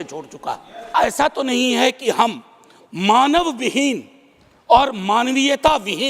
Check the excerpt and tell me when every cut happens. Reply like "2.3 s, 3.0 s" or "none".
0.9 s